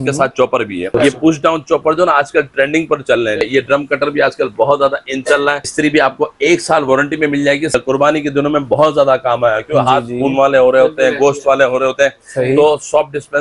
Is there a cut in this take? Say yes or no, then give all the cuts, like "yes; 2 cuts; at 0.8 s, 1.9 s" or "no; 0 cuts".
yes; 4 cuts; at 0.9 s, 3.4 s, 5.7 s, 7.7 s